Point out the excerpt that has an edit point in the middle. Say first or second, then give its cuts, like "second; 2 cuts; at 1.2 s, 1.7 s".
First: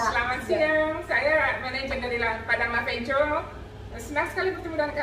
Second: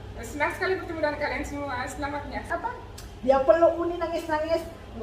second; 1 cut; at 2.5 s